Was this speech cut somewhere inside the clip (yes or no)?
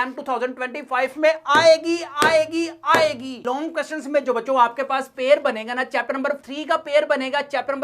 yes